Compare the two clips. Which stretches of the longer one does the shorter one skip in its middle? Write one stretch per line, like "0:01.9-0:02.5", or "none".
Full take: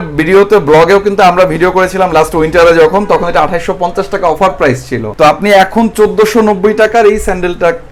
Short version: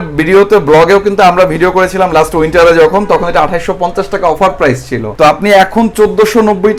none

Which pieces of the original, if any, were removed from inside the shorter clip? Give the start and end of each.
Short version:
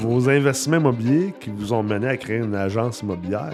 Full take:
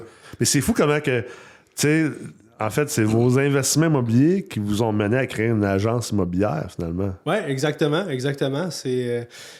none

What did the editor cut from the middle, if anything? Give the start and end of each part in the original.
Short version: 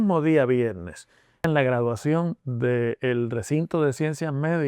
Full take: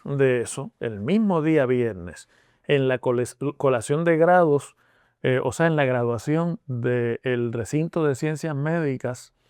0:02.7-0:05.7

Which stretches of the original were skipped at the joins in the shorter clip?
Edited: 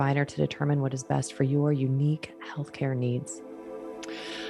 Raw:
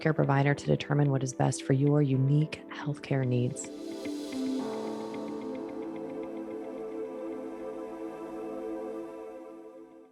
0:03.6-0:07.3

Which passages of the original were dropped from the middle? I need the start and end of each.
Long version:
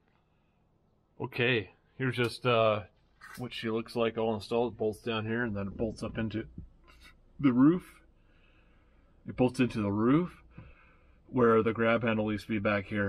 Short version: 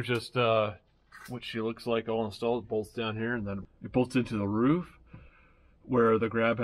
0:05.7-0:09.1

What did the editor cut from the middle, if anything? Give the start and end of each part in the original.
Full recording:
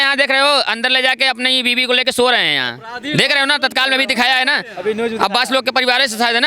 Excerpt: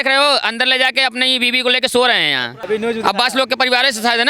0:02.8-0:04.7

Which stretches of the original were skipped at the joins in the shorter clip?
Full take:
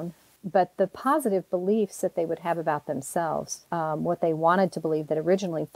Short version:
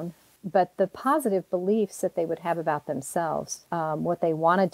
none

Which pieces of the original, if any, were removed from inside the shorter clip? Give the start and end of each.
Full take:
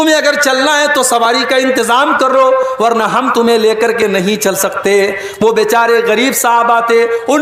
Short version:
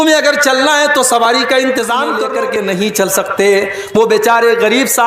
0:02.2-0:03.7

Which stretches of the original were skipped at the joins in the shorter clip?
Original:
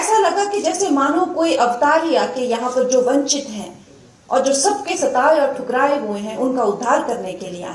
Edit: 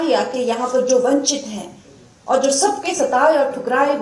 none

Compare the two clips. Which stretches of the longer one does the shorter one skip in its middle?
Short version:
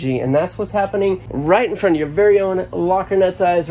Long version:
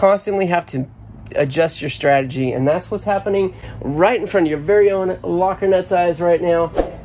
0:03.6-0:03.8

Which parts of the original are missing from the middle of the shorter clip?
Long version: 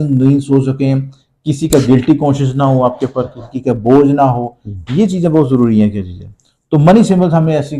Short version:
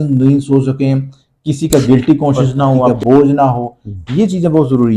0:02.9-0:03.7

